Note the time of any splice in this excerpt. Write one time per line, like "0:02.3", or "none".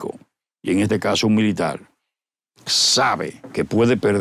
none